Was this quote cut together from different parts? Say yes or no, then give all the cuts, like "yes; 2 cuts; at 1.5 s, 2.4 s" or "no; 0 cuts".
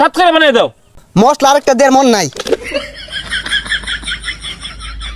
yes; 2 cuts; at 0.9 s, 2.8 s